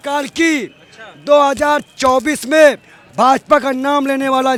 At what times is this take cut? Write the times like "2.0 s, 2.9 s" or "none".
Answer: none